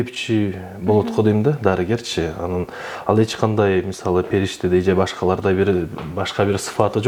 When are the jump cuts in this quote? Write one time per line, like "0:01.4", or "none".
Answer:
none